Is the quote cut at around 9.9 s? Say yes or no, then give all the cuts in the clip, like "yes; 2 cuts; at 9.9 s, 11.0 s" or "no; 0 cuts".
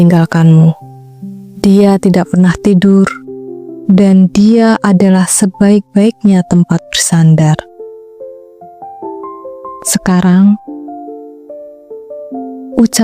yes; 2 cuts; at 8.0 s, 9.9 s